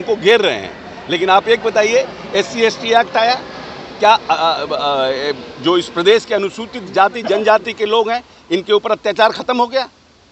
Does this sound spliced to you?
no; 0 cuts

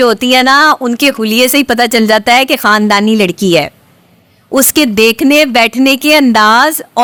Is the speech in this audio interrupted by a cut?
no; 0 cuts

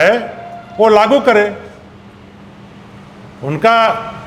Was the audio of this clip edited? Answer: no; 0 cuts

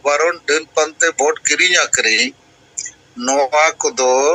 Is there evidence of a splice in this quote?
no; 0 cuts

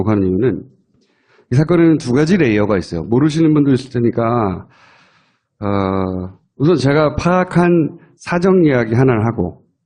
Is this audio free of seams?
yes; 0 cuts

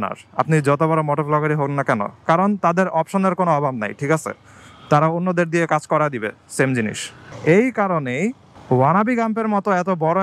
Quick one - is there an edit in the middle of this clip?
no; 0 cuts

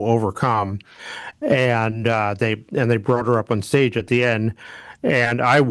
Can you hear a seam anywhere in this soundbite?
no; 0 cuts

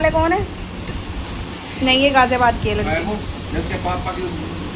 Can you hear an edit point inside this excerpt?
no; 0 cuts

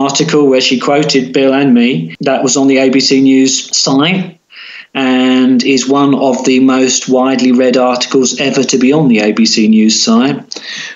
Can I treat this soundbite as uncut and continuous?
no; 2 cuts; at 2.1 s, 3.7 s

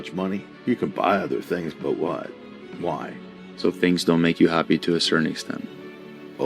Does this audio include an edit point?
no; 0 cuts

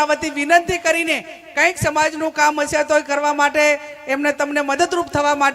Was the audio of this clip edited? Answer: no; 0 cuts

